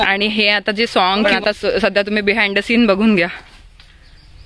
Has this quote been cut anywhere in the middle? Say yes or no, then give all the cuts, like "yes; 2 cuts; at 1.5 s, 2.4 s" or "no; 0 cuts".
yes; 1 cut; at 1.3 s